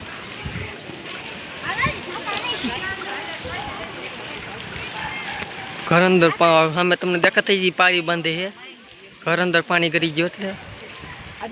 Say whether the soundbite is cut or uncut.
uncut